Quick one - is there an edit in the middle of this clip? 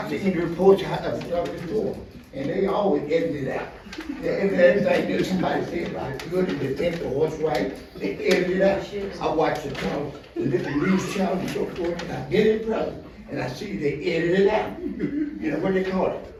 no; 0 cuts

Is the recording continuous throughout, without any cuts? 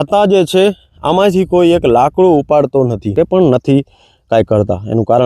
no; 1 cut; at 3.1 s

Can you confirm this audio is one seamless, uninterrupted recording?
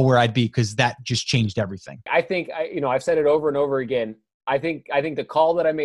no; 1 cut; at 2.1 s

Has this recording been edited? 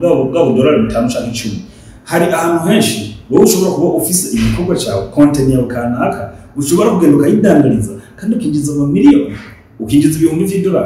no; 0 cuts

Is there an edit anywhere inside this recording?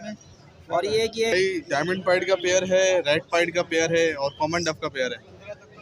yes; 1 cut; at 1.3 s

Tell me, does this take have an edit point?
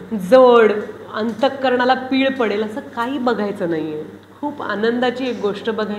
no; 0 cuts

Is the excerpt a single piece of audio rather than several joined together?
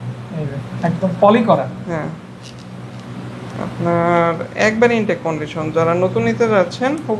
yes; 0 cuts

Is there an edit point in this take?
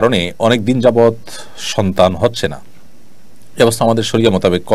no; 0 cuts

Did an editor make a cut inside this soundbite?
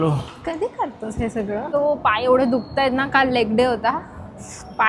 yes; 1 cut; at 1.7 s

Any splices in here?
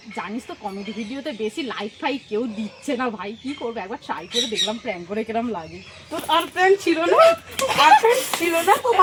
no; 0 cuts

